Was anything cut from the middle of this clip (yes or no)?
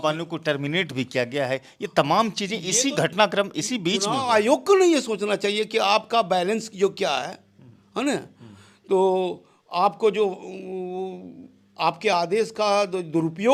no